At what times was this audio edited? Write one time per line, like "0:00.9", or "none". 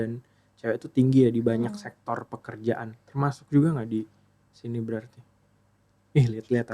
none